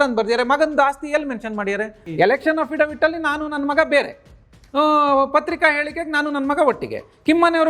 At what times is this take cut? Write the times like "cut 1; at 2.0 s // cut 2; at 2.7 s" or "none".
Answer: cut 1; at 2.0 s